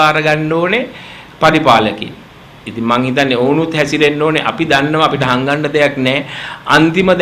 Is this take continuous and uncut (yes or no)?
yes